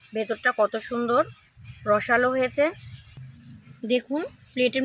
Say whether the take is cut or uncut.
cut